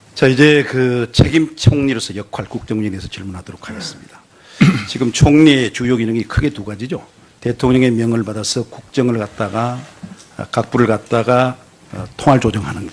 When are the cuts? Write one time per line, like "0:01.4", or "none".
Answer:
0:06.0

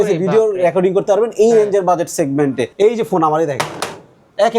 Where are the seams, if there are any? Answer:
0:02.7

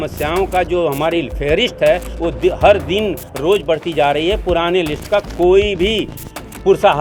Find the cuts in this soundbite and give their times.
none

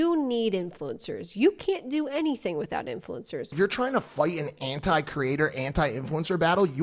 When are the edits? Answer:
0:03.5

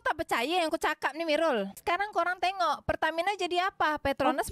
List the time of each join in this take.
0:01.8

